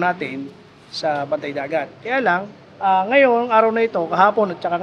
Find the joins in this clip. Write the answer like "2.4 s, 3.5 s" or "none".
none